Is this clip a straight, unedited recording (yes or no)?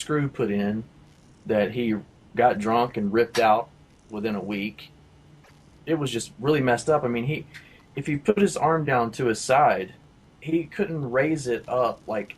no